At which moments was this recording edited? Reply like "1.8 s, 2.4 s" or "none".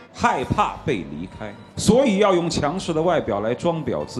none

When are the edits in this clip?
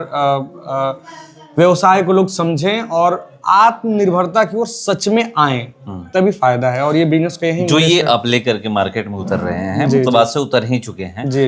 none

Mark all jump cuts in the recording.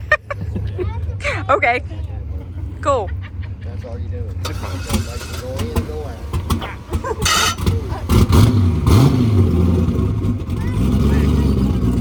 none

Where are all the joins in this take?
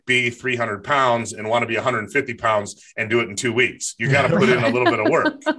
none

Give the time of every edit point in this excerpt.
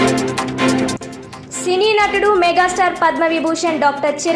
none

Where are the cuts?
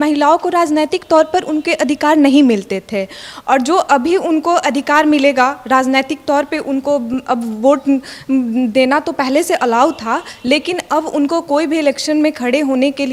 none

